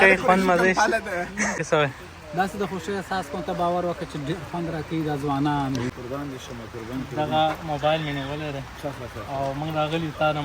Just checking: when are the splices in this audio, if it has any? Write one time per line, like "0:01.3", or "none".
0:01.6
0:05.9

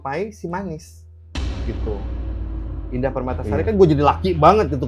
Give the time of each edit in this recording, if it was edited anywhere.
0:02.8

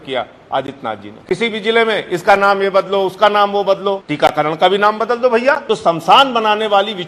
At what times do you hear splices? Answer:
0:01.1
0:04.1
0:05.6

